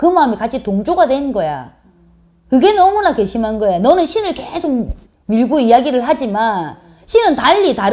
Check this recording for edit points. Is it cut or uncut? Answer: uncut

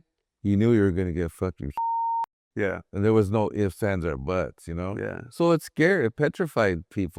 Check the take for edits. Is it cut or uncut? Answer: uncut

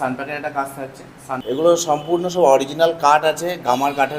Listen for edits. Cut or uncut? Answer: cut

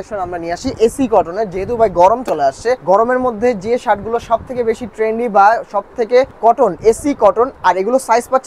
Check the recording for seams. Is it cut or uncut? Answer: cut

